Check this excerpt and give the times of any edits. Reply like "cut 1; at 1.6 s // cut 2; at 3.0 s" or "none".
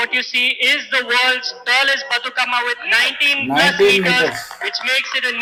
none